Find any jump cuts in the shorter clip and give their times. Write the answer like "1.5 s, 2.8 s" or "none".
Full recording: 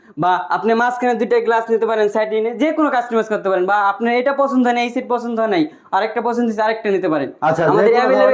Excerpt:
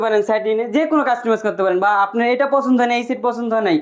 none